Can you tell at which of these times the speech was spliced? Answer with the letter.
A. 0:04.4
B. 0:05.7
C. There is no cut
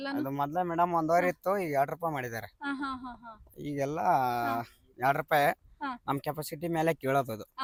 C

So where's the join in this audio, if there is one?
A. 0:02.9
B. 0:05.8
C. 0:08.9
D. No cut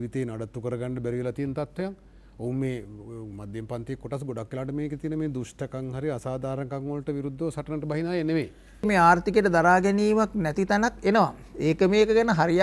C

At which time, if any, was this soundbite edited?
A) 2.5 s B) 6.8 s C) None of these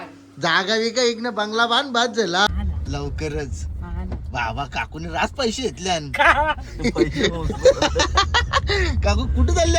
A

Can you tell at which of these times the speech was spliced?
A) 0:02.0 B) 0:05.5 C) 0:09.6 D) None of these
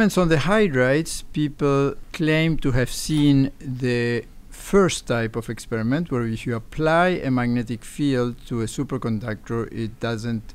A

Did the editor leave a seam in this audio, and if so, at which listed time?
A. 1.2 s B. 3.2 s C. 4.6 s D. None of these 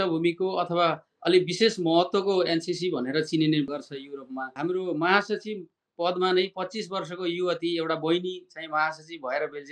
C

